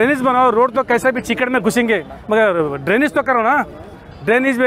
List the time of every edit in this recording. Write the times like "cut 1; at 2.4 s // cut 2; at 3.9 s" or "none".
none